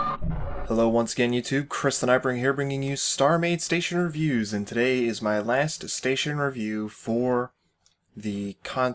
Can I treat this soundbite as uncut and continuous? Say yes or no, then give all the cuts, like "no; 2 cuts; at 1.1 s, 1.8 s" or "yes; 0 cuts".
yes; 0 cuts